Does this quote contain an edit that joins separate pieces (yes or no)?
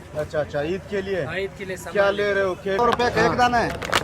yes